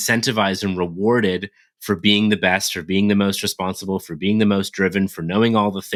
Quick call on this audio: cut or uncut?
uncut